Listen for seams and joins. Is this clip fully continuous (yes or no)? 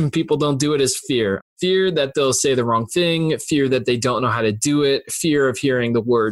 no